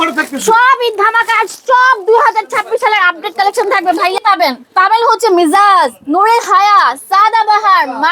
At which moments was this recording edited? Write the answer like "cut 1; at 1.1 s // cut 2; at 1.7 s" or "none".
cut 1; at 4.0 s